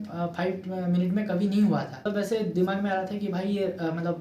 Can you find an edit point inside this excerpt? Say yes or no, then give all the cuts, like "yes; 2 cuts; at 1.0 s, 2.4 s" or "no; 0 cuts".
no; 0 cuts